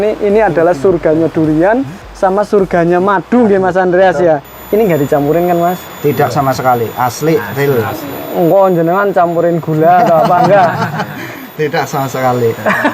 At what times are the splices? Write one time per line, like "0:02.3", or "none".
0:04.5